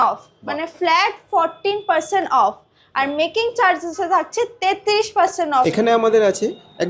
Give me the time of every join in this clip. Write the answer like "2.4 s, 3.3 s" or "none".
5.6 s